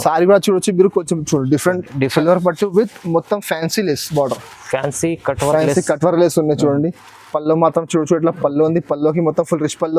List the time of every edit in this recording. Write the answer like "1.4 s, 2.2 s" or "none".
2.1 s